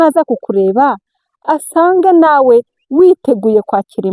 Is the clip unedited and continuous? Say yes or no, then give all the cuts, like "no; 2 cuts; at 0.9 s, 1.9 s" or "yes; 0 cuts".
yes; 0 cuts